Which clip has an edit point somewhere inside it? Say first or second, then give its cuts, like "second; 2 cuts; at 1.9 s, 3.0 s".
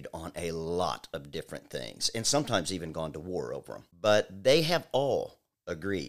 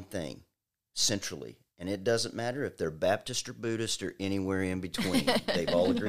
first; 1 cut; at 3.8 s